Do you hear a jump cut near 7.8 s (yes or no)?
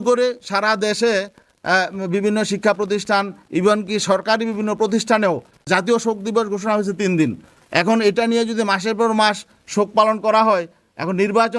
no